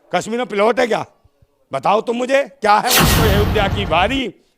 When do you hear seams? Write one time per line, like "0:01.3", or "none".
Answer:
0:03.1